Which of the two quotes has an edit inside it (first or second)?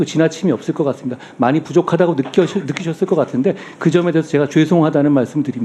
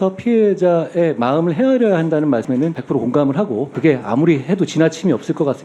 second